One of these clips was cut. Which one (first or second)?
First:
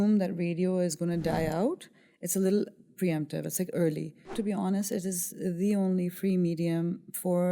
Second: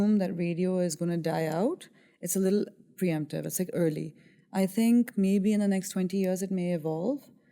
first